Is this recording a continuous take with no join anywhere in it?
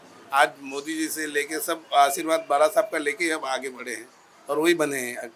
yes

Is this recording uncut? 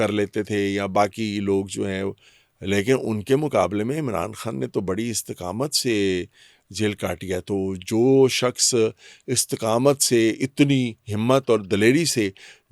yes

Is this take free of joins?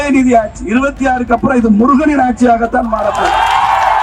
yes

